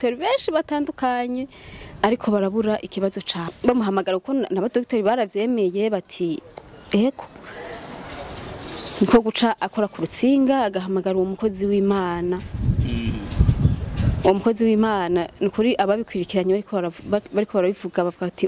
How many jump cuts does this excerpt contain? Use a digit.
1